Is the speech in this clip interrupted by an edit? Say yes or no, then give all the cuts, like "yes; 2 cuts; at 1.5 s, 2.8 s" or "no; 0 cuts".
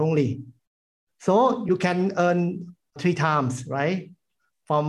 yes; 1 cut; at 1.6 s